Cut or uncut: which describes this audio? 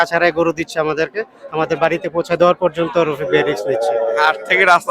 cut